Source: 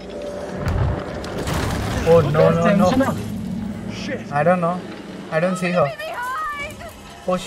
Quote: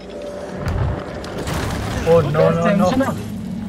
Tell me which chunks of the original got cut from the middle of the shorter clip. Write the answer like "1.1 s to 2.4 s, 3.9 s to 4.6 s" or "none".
none